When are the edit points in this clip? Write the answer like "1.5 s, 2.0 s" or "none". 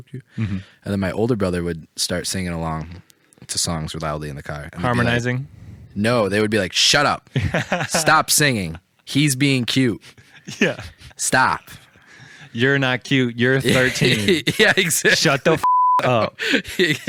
none